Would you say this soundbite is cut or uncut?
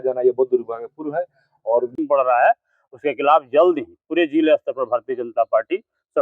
cut